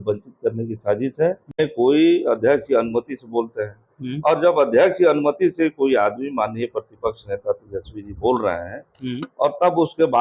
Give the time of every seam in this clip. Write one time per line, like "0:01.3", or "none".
0:01.6
0:04.7